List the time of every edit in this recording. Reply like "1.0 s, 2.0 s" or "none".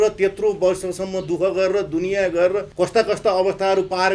2.7 s